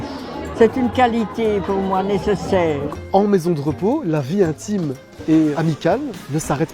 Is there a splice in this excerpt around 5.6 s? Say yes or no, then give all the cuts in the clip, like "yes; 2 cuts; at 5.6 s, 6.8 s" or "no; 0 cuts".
yes; 2 cuts; at 2.9 s, 5.6 s